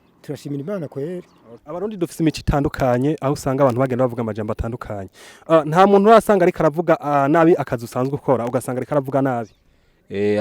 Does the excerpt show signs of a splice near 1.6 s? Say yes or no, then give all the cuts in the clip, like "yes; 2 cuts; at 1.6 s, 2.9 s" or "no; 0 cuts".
yes; 1 cut; at 1.6 s